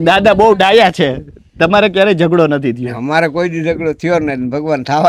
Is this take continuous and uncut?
yes; 0 cuts

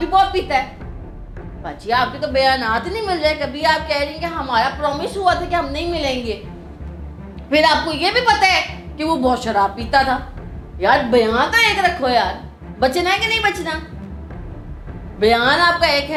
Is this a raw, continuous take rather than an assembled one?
yes; 0 cuts

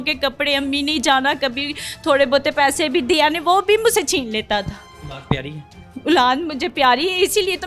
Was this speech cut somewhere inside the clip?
no; 0 cuts

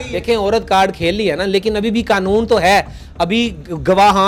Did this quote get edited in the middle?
no; 0 cuts

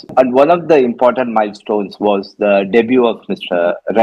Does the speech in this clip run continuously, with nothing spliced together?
yes; 0 cuts

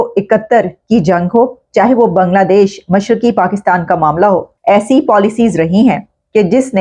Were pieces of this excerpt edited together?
yes; 1 cut; at 4.5 s

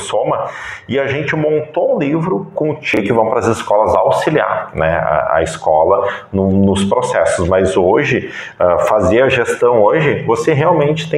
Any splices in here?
yes; 1 cut; at 3.0 s

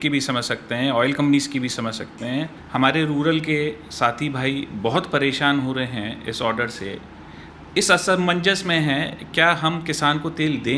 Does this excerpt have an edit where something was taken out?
yes; 1 cut; at 2.6 s

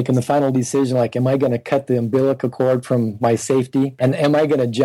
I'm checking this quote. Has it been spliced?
yes; 1 cut; at 3.9 s

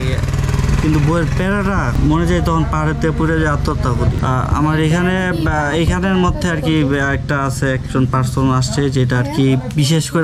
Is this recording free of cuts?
yes; 0 cuts

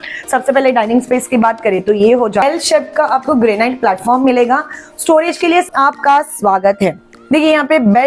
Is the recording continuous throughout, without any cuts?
no; 2 cuts; at 2.4 s, 5.7 s

